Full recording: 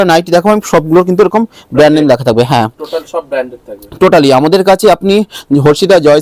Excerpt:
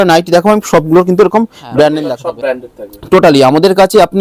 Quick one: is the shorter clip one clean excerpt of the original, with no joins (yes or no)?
no